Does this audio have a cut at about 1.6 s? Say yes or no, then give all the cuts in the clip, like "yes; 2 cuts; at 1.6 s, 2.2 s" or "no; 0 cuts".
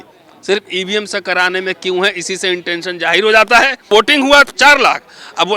no; 1 cut; at 3.9 s